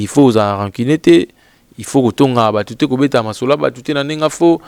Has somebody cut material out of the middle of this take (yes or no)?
no